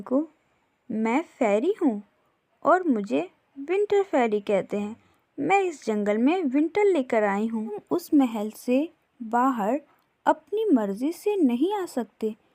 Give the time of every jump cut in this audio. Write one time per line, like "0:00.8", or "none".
0:07.8